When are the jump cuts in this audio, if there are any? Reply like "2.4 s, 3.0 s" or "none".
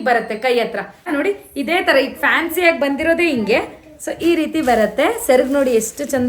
1.1 s